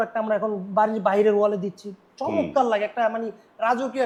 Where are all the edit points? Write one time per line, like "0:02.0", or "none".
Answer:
none

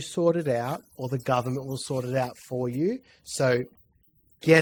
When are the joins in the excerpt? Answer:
none

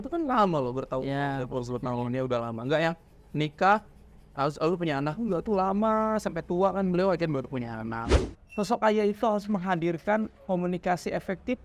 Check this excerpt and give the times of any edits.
0:08.1

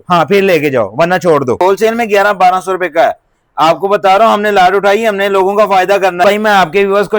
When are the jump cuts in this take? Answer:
0:01.8
0:06.2

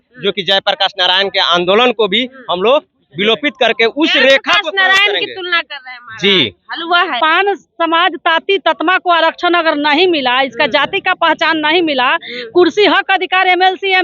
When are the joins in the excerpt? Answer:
0:07.2

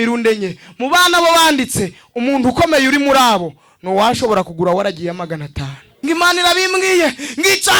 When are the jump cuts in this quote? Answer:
0:05.9

